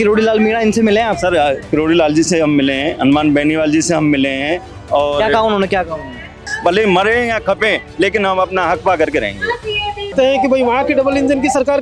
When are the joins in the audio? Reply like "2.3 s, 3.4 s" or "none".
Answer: 6.5 s, 10.1 s